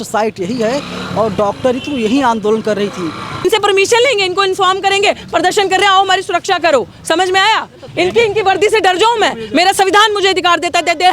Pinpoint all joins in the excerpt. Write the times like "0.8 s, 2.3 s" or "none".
3.3 s, 7.8 s